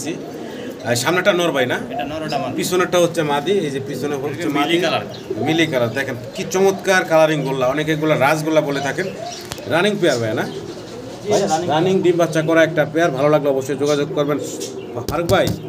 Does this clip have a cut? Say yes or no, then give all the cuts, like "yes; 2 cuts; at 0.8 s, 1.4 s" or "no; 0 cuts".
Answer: no; 0 cuts